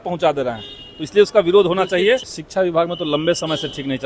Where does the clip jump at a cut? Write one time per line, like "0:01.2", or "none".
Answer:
0:02.4